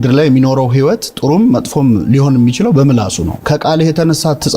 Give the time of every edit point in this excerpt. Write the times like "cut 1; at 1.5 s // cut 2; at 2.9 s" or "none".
cut 1; at 3.3 s